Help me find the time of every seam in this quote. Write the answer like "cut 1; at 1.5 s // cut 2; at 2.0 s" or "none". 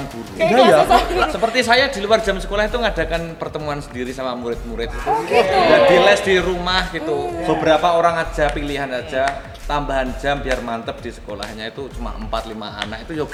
none